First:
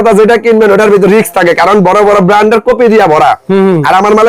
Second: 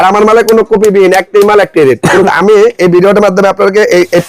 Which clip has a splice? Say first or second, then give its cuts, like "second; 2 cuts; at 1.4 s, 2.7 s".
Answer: second; 1 cut; at 2.3 s